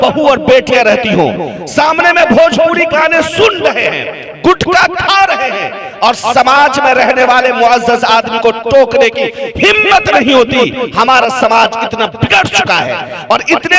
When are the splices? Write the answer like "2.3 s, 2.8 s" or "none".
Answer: none